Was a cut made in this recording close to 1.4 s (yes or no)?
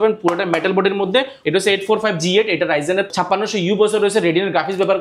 yes